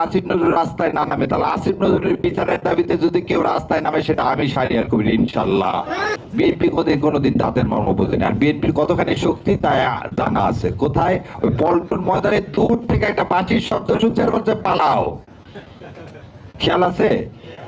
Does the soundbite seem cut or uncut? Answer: cut